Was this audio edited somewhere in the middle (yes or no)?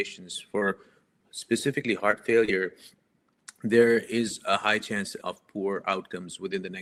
no